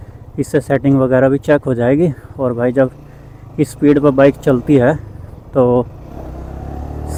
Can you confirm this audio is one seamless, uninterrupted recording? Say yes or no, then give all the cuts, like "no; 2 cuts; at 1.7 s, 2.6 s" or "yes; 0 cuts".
yes; 0 cuts